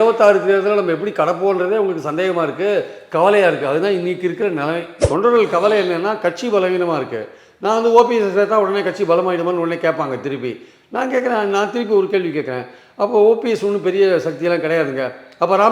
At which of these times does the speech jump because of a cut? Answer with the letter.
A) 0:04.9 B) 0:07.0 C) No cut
A